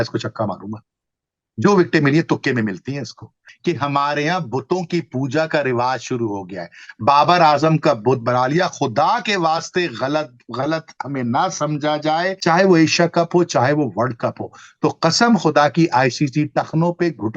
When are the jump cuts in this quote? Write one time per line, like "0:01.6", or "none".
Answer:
0:03.5
0:12.4